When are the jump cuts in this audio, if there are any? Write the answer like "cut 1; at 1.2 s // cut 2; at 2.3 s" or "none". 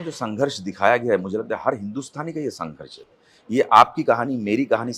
none